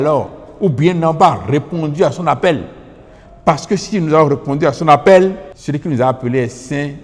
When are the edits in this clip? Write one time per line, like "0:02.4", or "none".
0:05.5